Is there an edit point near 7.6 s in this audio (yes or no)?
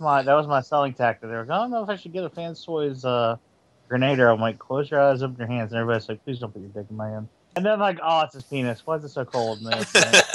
yes